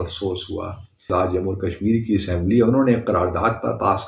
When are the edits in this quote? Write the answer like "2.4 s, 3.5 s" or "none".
1.1 s

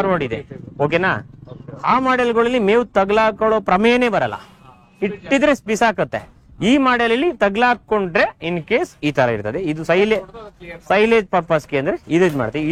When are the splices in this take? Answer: none

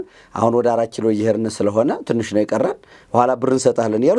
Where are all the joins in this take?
none

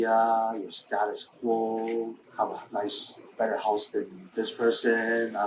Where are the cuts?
2.2 s, 4.2 s

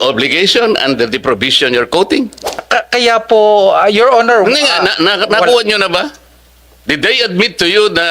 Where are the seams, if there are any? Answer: 2.6 s

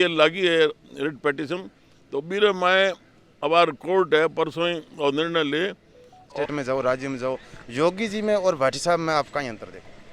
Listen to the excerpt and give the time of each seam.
6.3 s

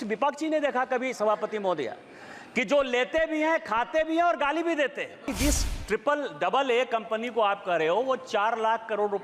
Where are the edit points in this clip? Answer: 5.3 s

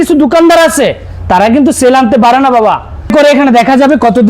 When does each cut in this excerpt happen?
3.1 s

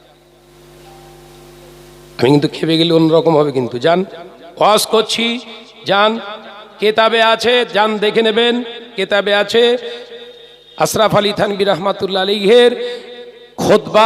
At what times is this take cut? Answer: none

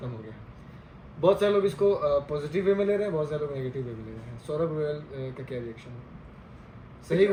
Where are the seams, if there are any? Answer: none

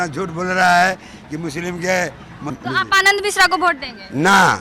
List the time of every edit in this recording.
2.5 s

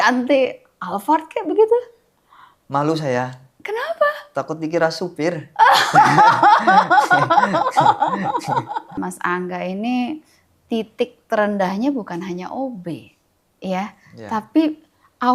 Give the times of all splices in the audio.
8.9 s

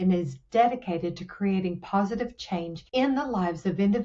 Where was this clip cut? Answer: 2.8 s

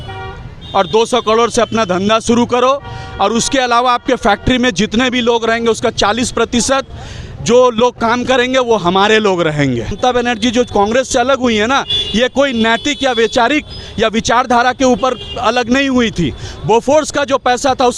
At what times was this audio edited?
10.0 s

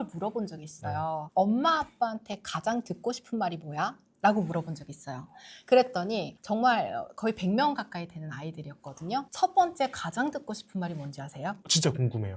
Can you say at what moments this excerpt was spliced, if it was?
none

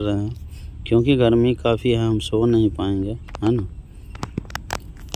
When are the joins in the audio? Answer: none

